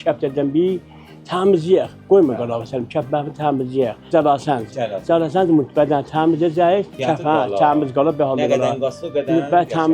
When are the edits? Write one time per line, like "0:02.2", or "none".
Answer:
0:04.1
0:07.0